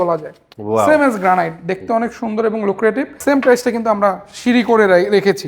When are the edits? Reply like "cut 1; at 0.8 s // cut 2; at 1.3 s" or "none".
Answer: cut 1; at 3.1 s